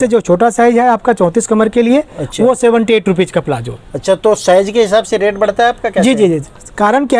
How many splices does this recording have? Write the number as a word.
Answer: zero